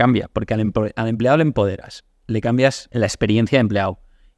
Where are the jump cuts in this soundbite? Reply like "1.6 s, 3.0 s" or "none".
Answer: 2.8 s